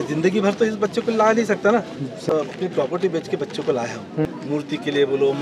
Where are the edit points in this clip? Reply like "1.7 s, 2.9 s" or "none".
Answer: 2.3 s, 4.3 s